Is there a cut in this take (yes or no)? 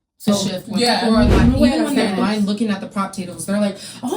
yes